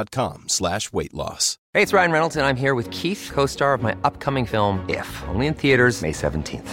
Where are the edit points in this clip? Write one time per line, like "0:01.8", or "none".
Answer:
0:01.5